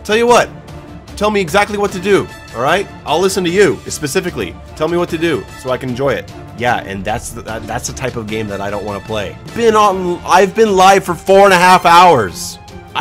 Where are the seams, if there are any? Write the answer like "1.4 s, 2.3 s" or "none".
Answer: 6.4 s, 9.5 s